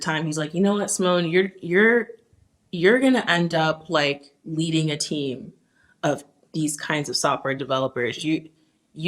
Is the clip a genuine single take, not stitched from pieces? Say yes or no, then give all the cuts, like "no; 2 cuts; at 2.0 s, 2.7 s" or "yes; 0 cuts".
yes; 0 cuts